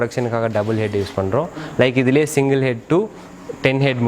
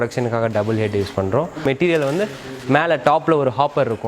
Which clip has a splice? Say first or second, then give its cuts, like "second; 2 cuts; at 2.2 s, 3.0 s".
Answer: second; 1 cut; at 1.6 s